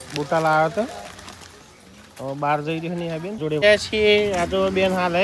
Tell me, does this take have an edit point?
yes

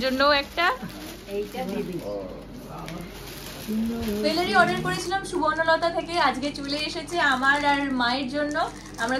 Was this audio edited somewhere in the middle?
yes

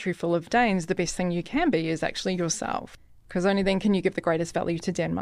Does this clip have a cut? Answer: yes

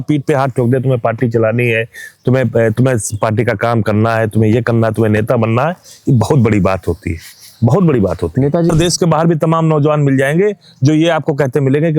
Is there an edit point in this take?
yes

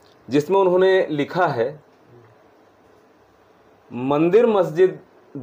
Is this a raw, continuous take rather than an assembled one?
yes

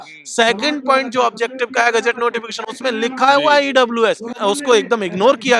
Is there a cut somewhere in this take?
yes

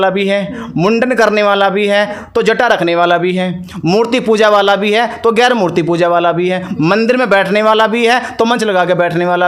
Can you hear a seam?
no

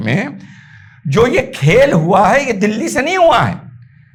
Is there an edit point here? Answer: no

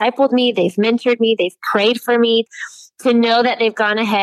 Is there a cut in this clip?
yes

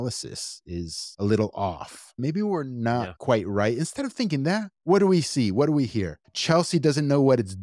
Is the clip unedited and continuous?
no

